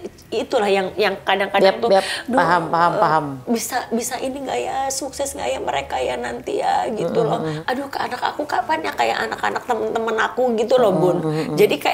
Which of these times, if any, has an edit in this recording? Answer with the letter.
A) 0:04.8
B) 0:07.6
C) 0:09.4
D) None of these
B